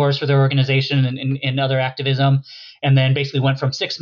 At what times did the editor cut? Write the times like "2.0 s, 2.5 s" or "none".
none